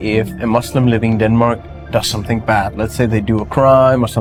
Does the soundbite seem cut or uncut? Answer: uncut